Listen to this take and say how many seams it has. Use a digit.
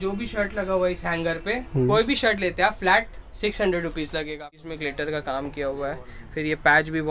1